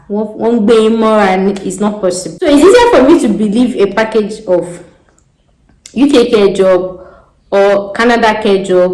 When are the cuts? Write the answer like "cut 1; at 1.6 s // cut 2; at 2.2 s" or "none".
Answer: cut 1; at 2.3 s